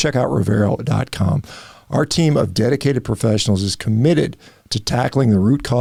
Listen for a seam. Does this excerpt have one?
no; 0 cuts

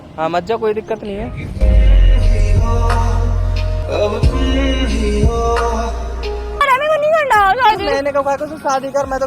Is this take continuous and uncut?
no; 1 cut; at 6.6 s

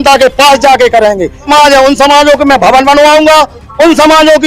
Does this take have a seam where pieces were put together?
yes; 1 cut; at 1.5 s

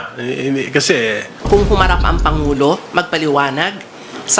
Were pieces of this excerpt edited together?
yes; 1 cut; at 1.3 s

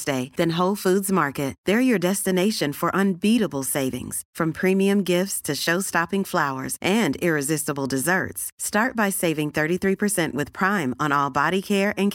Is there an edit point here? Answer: no; 0 cuts

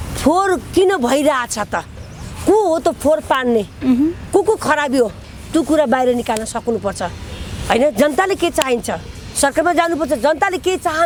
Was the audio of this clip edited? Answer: no; 0 cuts

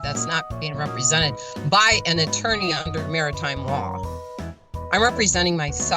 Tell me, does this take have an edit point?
no; 0 cuts

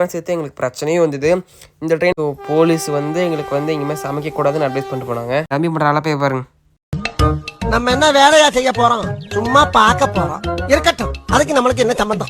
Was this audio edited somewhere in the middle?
yes; 2 cuts; at 2.1 s, 5.5 s

